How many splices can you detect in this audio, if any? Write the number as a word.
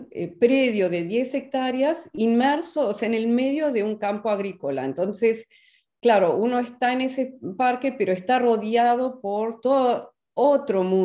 zero